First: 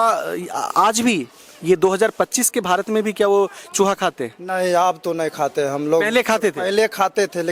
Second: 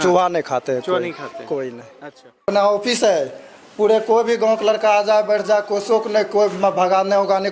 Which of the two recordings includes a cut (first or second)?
second